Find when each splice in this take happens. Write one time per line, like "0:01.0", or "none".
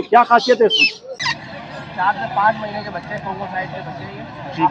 0:01.3